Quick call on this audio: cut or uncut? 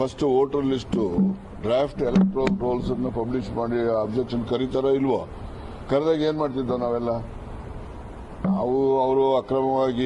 cut